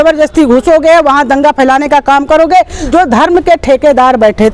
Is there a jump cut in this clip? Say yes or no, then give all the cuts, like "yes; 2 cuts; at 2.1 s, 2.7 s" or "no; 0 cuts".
yes; 1 cut; at 2.9 s